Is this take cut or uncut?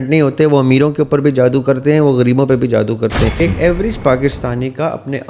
cut